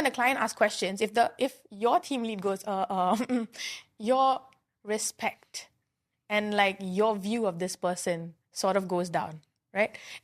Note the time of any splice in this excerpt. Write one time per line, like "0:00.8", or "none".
none